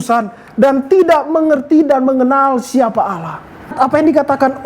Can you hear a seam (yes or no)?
yes